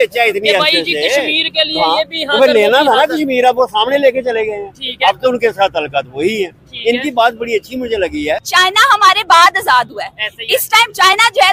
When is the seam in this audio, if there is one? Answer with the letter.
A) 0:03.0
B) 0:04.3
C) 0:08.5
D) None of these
C